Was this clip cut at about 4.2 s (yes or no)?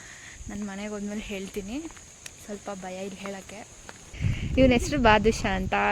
yes